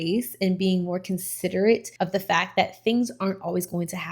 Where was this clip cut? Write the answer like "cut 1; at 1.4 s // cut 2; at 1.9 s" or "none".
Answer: cut 1; at 1.9 s